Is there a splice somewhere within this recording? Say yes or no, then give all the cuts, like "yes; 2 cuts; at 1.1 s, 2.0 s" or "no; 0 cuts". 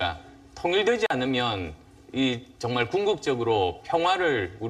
yes; 1 cut; at 1.3 s